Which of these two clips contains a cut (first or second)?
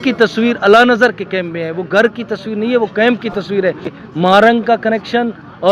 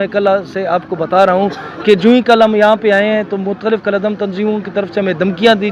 first